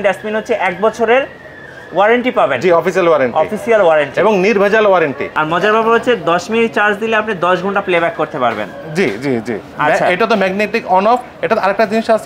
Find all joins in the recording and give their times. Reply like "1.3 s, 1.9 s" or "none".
5.3 s, 9.7 s